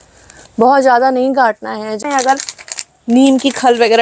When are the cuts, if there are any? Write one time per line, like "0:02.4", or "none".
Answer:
0:02.0